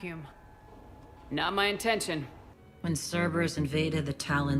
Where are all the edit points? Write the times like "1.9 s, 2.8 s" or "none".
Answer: 2.4 s